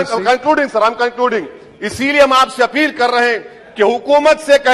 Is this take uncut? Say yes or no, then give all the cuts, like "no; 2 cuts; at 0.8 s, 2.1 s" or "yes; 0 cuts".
yes; 0 cuts